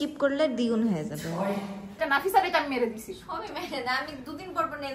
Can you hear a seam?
yes; 1 cut; at 1.9 s

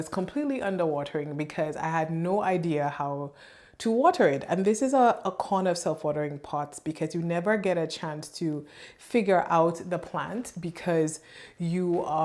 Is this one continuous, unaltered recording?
yes; 0 cuts

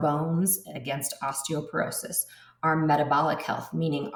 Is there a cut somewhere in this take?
no; 0 cuts

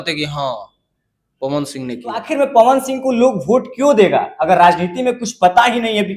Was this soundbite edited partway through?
yes; 1 cut; at 2.2 s

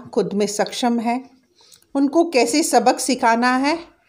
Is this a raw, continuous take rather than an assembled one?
yes; 0 cuts

